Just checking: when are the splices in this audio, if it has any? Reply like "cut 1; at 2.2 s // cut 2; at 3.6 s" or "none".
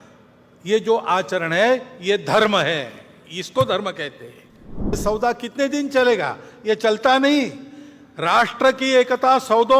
cut 1; at 4.9 s

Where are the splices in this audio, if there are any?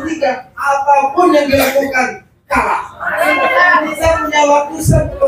cut 1; at 3.3 s

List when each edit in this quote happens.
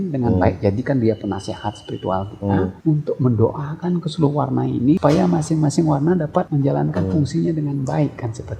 cut 1; at 2.8 s // cut 2; at 5.0 s // cut 3; at 6.5 s

